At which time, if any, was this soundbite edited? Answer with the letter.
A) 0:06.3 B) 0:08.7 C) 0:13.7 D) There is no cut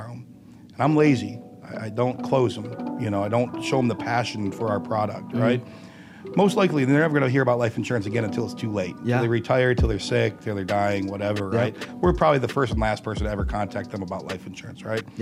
D